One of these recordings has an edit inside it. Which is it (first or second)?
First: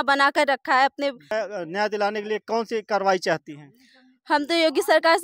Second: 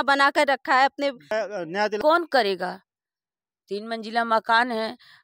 second